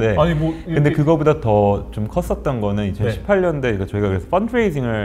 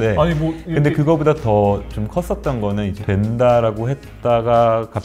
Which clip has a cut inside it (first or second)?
second